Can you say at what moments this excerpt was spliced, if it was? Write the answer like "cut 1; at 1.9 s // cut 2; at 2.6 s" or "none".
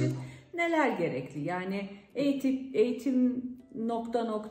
none